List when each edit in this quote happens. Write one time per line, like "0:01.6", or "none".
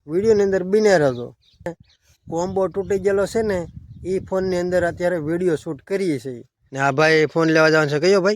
0:01.7
0:06.7